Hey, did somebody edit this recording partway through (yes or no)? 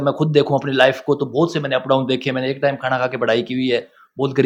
no